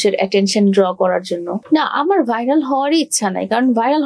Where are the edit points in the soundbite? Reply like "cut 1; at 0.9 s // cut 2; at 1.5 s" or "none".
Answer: cut 1; at 1.6 s